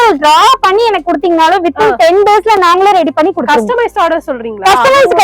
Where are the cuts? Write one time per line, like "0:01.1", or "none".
none